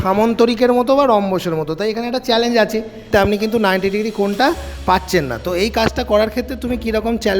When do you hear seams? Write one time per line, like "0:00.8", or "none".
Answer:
0:03.1